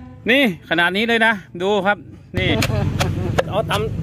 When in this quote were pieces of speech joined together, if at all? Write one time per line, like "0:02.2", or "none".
0:02.2